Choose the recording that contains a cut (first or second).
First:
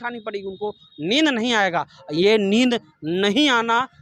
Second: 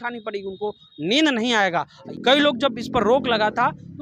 second